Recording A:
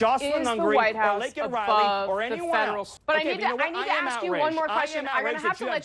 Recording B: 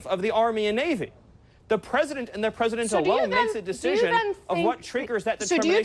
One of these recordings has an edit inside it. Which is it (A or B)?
A